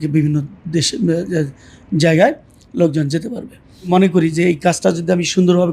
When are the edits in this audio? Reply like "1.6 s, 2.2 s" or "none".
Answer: 3.9 s

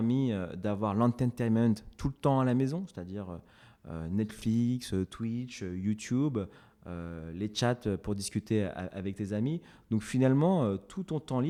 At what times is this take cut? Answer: none

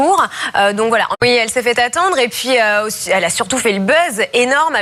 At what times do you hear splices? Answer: none

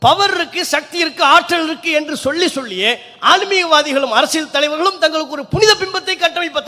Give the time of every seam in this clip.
none

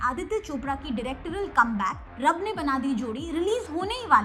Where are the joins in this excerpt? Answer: none

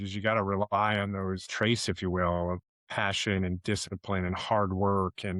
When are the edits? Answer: 1.4 s, 2.7 s

